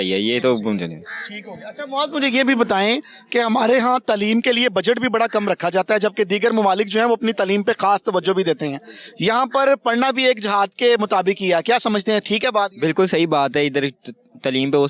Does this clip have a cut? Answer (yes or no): no